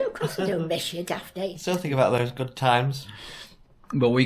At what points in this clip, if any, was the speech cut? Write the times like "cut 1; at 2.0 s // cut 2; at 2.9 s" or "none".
cut 1; at 1.6 s